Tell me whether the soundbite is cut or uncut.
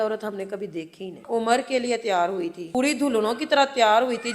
cut